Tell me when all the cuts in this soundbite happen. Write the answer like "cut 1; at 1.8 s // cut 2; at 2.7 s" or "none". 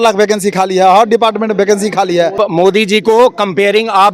cut 1; at 2.3 s